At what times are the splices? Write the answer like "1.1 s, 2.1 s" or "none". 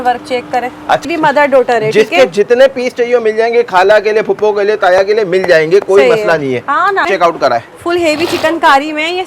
1.0 s, 7.1 s